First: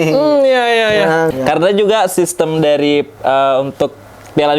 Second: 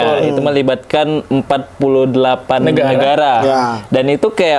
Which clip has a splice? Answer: first; 1 cut; at 1.3 s

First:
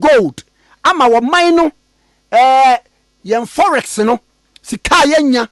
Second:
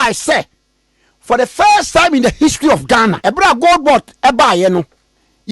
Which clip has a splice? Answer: second; 1 cut; at 3.2 s

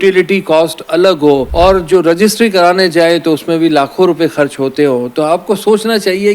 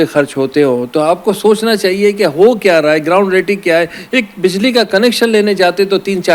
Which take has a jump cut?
first; 1 cut; at 1.5 s

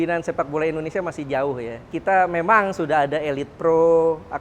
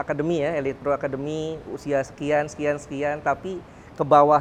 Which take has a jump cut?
first; 1 cut; at 1.9 s

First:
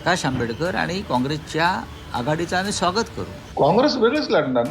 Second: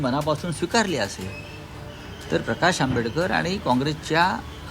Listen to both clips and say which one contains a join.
first; 1 cut; at 3.4 s

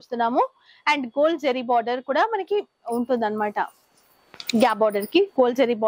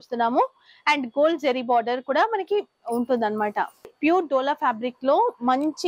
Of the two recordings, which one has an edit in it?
second; 1 cut; at 3.9 s

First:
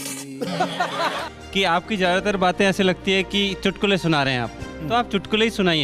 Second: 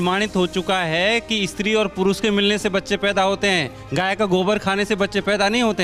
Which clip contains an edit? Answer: first; 1 cut; at 1.3 s

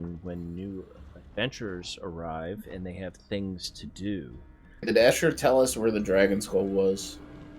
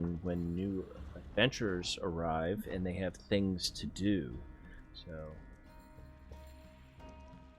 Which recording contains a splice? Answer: first; 1 cut; at 4.9 s

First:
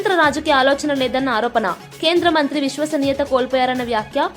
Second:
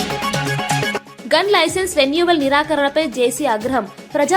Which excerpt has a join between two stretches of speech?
second; 1 cut; at 1.0 s

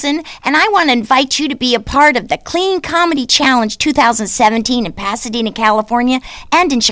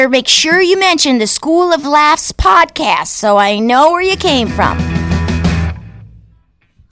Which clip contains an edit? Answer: second; 1 cut; at 4.8 s

